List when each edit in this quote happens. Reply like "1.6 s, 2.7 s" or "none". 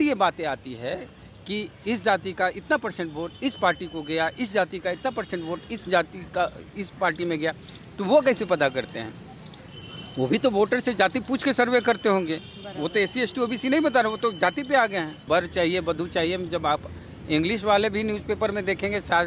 15.1 s